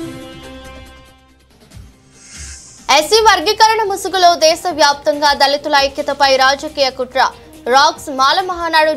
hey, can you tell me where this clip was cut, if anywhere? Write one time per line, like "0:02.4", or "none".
none